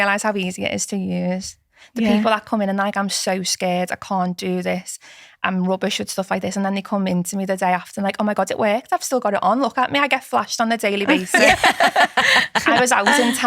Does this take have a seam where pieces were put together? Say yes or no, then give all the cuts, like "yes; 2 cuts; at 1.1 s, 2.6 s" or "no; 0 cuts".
no; 0 cuts